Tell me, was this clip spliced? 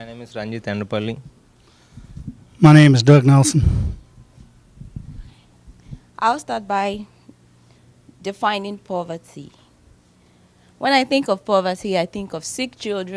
yes; 1 cut; at 6.7 s

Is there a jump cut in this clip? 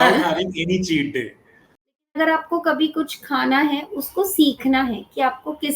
yes; 1 cut; at 1.9 s

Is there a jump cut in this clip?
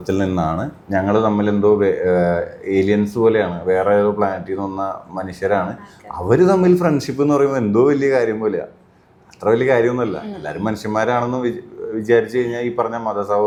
no; 0 cuts

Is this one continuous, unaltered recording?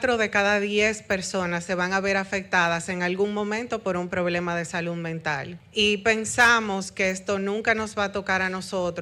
no; 1 cut; at 5.6 s

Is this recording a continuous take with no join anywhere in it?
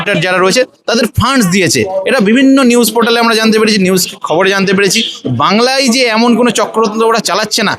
yes; 0 cuts

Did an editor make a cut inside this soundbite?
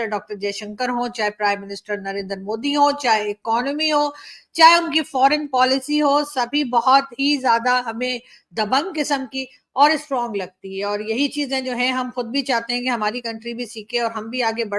no; 0 cuts

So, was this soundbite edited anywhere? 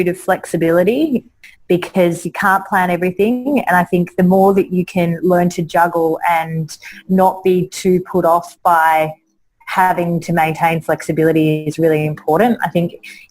yes; 1 cut; at 1.4 s

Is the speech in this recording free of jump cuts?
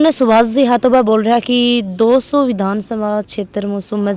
yes; 0 cuts

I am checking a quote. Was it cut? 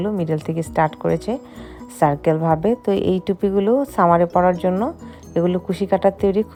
no; 0 cuts

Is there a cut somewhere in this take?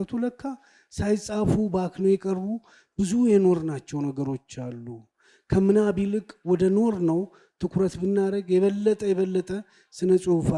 no; 0 cuts

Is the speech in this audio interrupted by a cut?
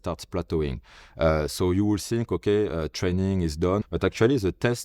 yes; 1 cut; at 3.8 s

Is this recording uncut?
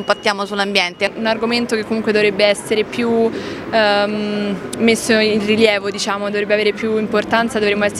no; 1 cut; at 1.1 s

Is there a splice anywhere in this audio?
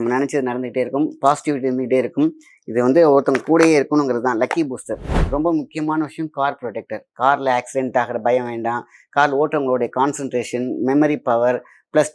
yes; 1 cut; at 5.1 s

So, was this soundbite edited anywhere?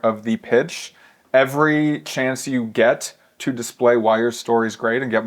no; 0 cuts

